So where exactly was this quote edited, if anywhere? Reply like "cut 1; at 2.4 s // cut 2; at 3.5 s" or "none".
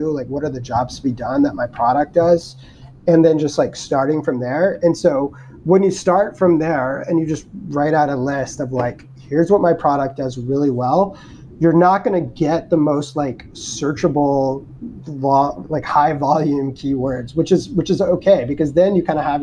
none